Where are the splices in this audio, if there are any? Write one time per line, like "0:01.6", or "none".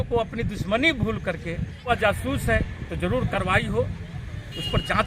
0:01.9

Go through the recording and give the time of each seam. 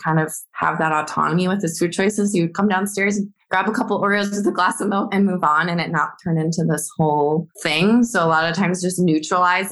0:03.4

